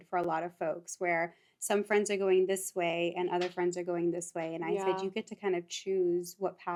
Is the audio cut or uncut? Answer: uncut